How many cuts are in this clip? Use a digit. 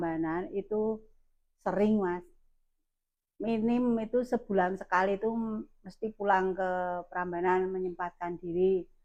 0